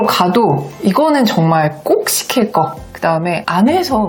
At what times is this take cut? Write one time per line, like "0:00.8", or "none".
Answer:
none

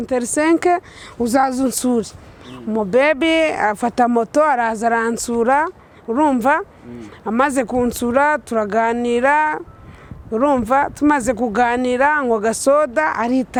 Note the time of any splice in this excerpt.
none

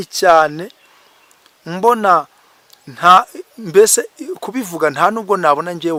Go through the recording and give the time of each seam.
none

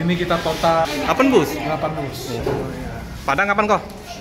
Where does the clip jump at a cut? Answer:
0:02.4

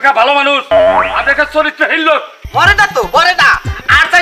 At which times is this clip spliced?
0:02.4

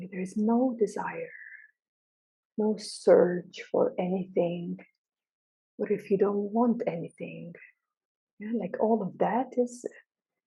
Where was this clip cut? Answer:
0:02.4

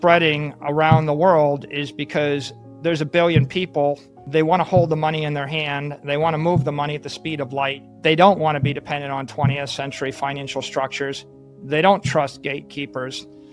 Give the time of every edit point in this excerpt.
0:04.1
0:07.9

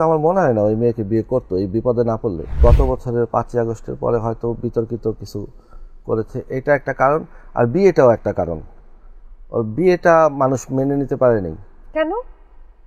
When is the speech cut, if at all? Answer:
0:02.6

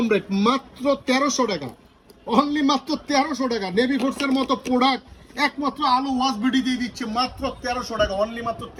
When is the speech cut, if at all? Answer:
none

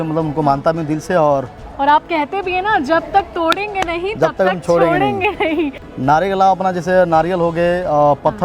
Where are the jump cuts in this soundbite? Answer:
0:01.6
0:05.8

